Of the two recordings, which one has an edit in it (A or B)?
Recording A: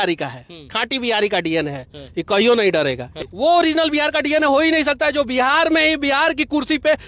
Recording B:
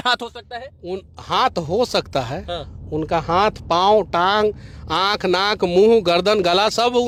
A